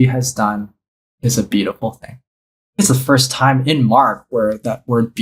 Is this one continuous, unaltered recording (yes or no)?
no